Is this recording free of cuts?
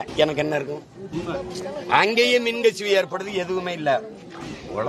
yes; 0 cuts

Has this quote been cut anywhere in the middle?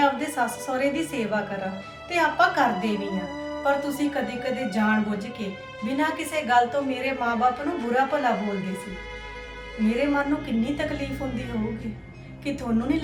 no; 0 cuts

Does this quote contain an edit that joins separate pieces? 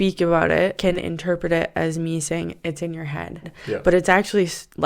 yes; 2 cuts; at 0.8 s, 3.5 s

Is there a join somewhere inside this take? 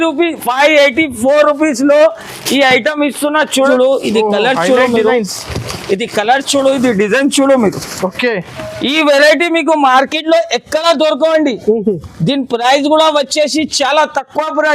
yes; 1 cut; at 3.5 s

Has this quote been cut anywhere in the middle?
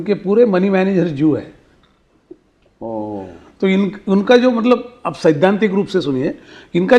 no; 0 cuts

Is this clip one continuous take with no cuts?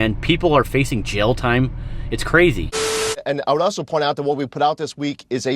no; 1 cut; at 3.0 s

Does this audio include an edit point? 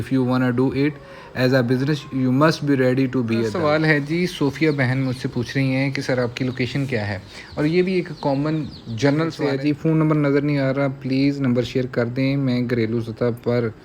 yes; 2 cuts; at 3.5 s, 9.4 s

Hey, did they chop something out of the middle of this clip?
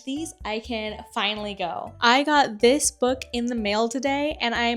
yes; 1 cut; at 1.8 s

